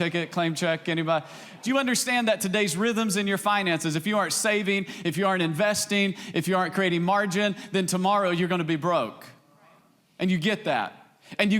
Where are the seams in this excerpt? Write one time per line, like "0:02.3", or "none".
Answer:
0:01.6

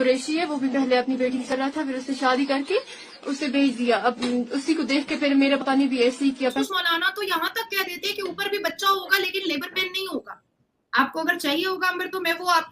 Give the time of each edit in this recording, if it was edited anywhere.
0:06.4

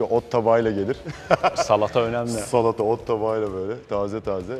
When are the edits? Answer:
none

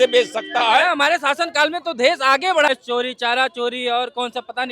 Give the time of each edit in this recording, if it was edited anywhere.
0:02.7

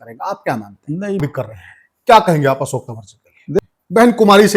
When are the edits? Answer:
0:01.2
0:03.6

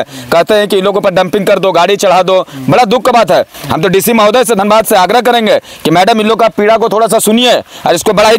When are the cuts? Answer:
none

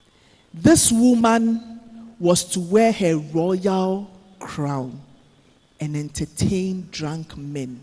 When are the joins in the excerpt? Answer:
none

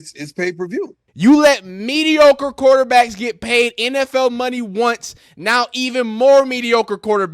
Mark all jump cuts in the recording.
0:01.0

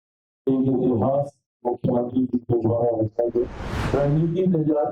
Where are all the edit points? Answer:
0:03.6

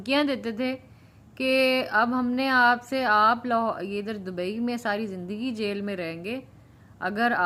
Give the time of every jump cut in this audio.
none

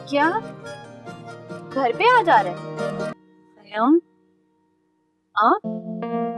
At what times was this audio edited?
0:03.1

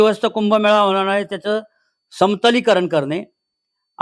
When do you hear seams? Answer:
none

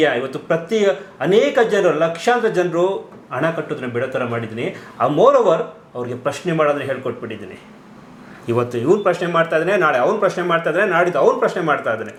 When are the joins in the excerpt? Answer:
none

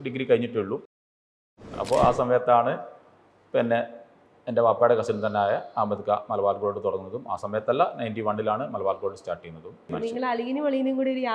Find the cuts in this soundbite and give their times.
0:01.4
0:09.9

